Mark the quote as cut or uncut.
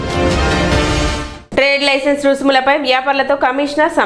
cut